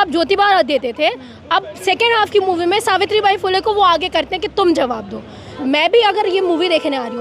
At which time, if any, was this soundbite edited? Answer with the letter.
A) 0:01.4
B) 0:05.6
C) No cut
B